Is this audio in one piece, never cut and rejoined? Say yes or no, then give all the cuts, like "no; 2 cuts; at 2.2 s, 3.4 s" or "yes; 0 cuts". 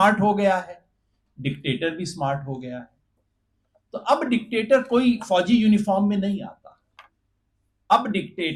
yes; 0 cuts